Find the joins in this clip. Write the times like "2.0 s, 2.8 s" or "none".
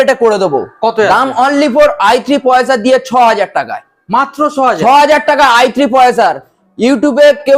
none

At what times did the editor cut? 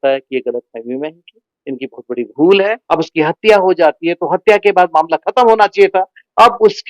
2.8 s

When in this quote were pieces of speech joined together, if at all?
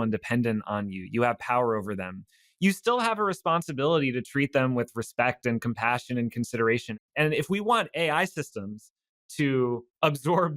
7.0 s

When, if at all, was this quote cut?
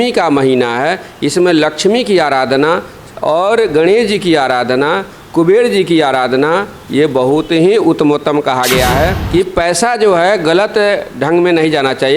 9.2 s

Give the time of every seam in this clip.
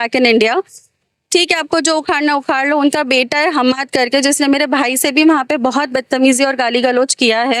none

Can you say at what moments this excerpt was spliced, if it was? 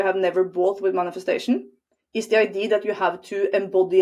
none

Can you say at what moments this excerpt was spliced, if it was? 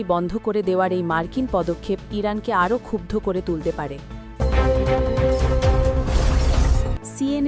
4.2 s, 6.8 s

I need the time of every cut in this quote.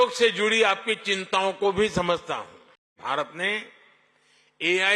3.0 s

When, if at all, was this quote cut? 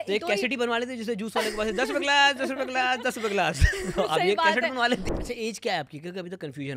5.0 s

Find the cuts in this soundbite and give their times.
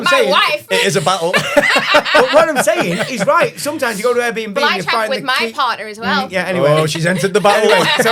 none

